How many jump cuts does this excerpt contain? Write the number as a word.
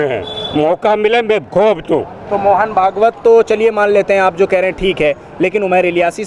zero